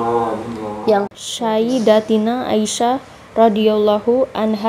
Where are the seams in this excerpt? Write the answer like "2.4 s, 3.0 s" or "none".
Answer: 1.1 s